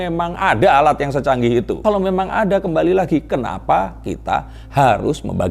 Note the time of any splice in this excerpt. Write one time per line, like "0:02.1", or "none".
none